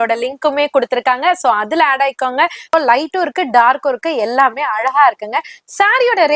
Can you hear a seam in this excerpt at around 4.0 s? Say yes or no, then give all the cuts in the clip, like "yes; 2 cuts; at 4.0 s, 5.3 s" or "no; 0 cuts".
no; 1 cut; at 2.7 s